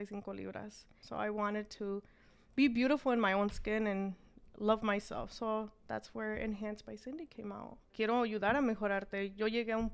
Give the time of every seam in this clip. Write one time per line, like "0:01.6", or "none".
0:01.0
0:07.9